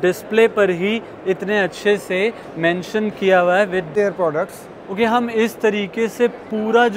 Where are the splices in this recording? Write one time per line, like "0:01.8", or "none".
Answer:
0:03.9